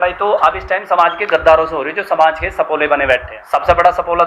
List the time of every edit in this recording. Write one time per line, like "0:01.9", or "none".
0:03.3